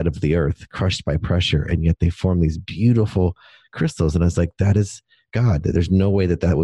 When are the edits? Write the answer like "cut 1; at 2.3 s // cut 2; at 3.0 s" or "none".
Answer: none